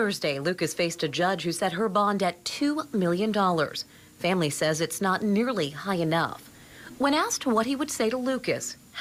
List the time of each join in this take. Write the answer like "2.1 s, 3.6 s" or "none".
none